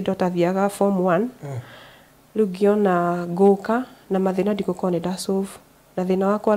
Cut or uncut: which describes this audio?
uncut